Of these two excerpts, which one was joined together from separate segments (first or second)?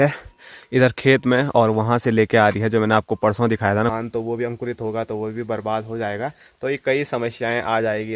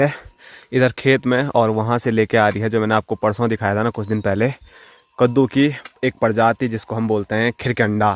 first